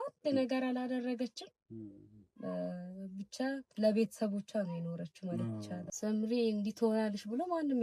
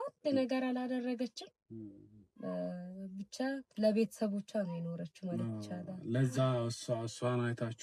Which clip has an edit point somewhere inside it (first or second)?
first